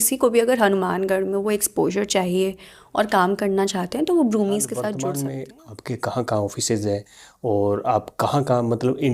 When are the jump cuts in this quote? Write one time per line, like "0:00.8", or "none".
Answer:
0:05.0